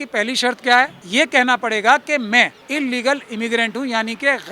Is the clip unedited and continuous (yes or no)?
no